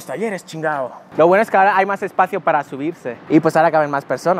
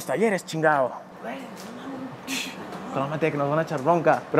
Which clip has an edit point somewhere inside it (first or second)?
first